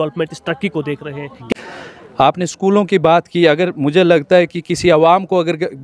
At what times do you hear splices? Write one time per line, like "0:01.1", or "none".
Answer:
0:01.3